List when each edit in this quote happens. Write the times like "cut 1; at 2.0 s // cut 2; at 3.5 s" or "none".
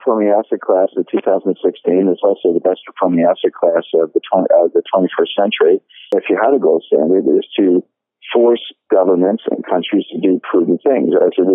cut 1; at 6.1 s